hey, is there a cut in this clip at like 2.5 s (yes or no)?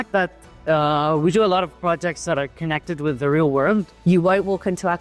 no